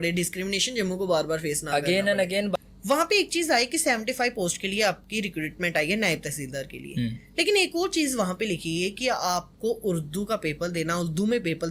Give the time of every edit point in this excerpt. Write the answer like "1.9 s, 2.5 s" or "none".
2.6 s